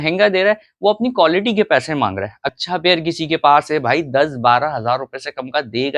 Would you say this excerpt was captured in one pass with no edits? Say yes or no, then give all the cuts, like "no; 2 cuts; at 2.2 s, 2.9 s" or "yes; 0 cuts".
no; 1 cut; at 2.5 s